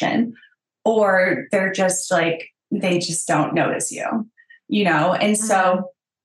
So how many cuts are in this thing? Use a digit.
1